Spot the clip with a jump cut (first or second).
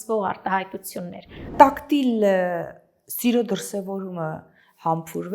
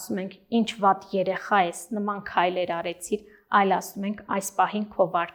first